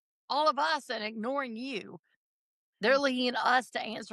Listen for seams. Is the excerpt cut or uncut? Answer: uncut